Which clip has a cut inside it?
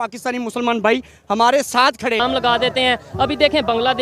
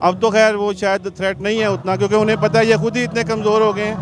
first; 1 cut; at 2.2 s

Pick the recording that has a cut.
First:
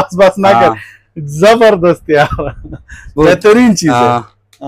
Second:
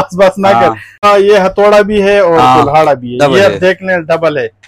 second; 1 cut; at 1.0 s

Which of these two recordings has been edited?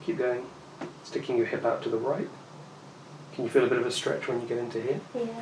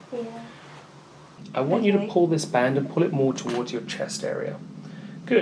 second; 1 cut; at 1.4 s

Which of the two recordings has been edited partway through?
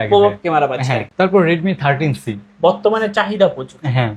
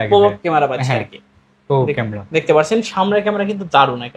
first; 1 cut; at 1.1 s

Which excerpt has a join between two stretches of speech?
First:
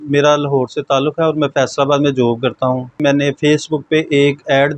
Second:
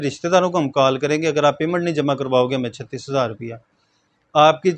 first; 1 cut; at 3.0 s

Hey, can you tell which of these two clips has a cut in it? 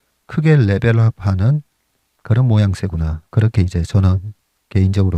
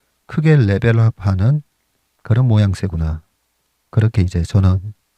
first; 1 cut; at 3.2 s

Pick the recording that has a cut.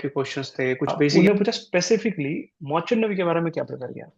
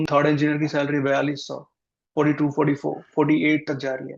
first; 1 cut; at 1.1 s

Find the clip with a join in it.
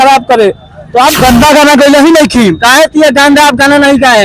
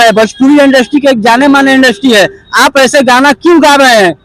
first; 1 cut; at 1.2 s

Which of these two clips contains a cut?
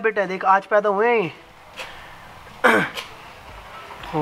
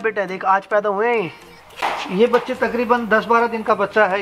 second; 1 cut; at 1.7 s

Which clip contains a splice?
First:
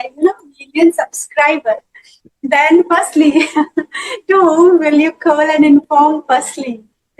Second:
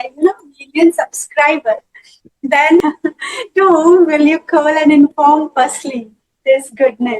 second; 1 cut; at 2.8 s

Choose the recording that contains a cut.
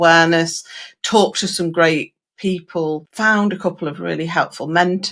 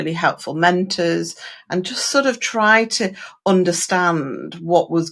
first; 1 cut; at 3.1 s

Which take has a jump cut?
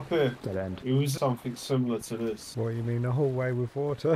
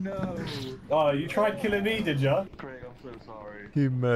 first; 1 cut; at 1.1 s

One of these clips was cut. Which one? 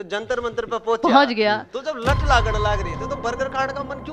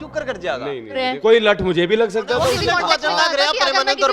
second; 2 cuts; at 1.1 s, 2.6 s

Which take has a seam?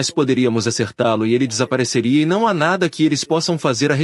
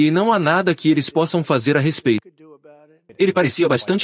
second; 1 cut; at 3.0 s

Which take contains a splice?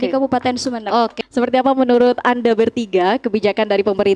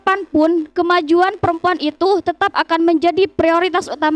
first; 1 cut; at 1.1 s

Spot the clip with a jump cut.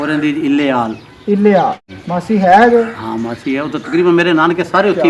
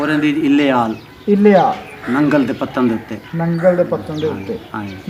first; 1 cut; at 1.9 s

